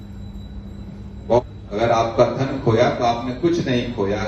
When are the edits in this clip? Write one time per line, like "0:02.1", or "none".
0:01.4